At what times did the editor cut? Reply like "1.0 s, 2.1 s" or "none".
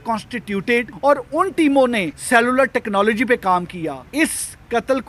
0.9 s, 2.1 s, 4.0 s